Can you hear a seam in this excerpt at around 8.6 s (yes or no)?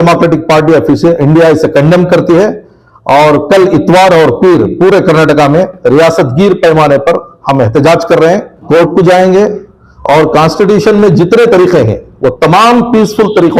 yes